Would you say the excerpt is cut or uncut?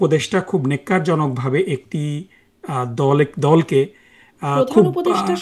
uncut